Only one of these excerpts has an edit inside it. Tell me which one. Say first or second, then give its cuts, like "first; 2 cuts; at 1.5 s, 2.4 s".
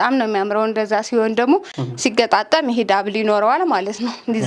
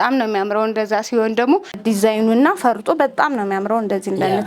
second; 1 cut; at 1.8 s